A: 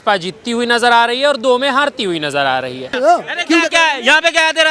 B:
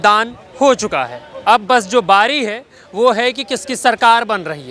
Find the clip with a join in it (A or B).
A